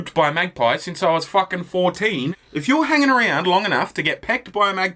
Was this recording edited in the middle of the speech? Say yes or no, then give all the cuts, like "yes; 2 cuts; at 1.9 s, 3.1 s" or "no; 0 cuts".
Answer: yes; 1 cut; at 2.3 s